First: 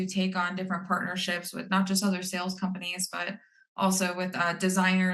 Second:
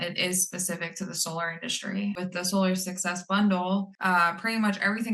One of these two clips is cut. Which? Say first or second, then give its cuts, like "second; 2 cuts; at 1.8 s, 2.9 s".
second; 2 cuts; at 2.2 s, 3.9 s